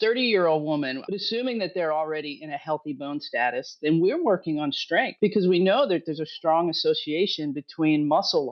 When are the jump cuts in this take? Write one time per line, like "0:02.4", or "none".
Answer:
0:01.0
0:05.1